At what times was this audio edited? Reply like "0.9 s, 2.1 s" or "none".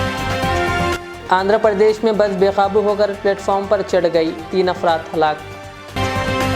0.9 s